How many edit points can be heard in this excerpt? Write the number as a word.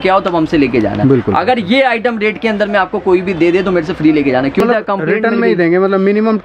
one